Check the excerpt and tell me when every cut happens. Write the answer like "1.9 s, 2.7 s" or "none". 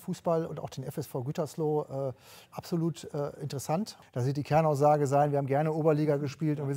4.0 s